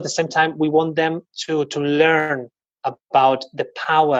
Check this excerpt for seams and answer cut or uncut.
uncut